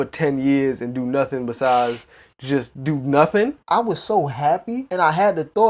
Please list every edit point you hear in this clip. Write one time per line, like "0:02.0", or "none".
0:03.6
0:04.8